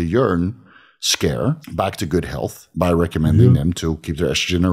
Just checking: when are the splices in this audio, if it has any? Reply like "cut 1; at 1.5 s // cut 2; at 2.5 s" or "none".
cut 1; at 1.7 s // cut 2; at 2.6 s